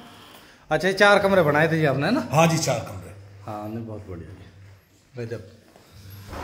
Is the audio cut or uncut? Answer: uncut